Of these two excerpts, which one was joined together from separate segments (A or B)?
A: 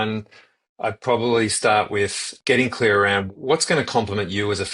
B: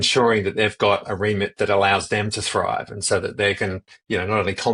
A